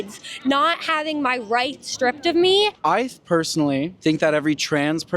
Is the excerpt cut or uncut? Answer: cut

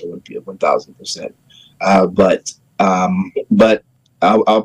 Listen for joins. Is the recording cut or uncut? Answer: cut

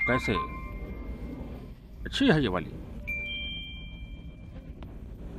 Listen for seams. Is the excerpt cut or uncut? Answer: uncut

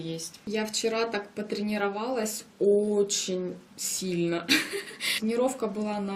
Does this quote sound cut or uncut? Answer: uncut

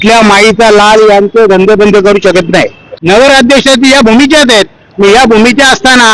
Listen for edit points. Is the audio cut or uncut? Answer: cut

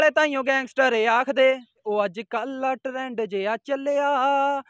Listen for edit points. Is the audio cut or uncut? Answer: cut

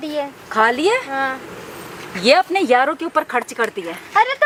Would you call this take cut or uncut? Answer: uncut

